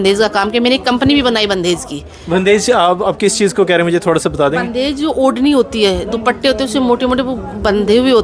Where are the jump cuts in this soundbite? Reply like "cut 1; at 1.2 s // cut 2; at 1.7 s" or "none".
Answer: none